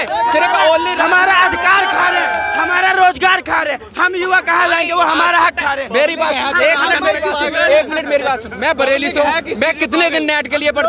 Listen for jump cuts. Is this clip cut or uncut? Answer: uncut